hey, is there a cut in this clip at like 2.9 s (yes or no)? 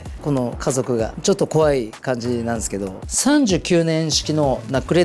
yes